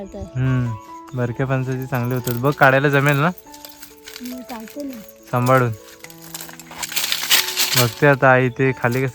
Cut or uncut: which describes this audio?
uncut